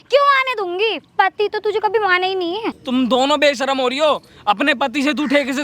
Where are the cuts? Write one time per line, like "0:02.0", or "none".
0:02.7